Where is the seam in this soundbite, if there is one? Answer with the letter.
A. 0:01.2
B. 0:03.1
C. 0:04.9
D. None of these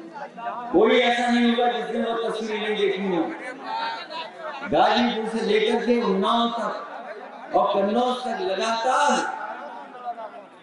D